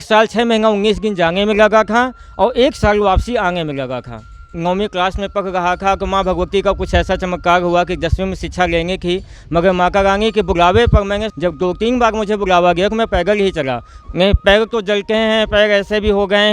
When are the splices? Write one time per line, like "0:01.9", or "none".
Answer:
0:04.5
0:11.3
0:13.9